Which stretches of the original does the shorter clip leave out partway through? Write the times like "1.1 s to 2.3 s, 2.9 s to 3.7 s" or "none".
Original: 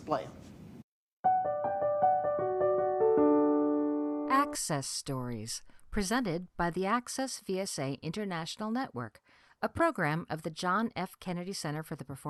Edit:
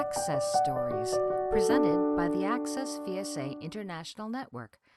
4.3 s to 7.2 s